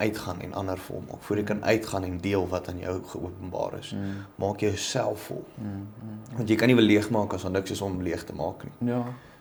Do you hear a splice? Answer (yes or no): no